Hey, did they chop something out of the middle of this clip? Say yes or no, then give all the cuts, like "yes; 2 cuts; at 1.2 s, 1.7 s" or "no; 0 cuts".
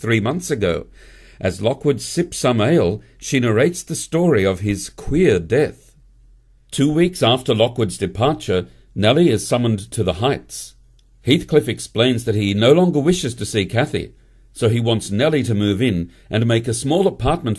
yes; 1 cut; at 1.6 s